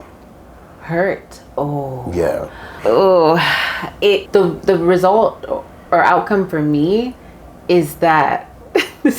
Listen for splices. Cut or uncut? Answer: cut